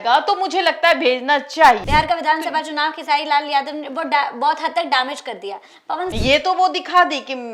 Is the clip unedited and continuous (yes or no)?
no